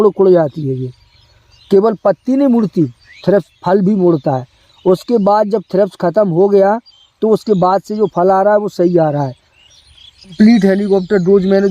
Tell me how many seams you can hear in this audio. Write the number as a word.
one